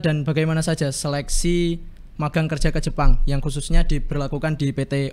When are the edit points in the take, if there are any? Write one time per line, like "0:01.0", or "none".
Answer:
none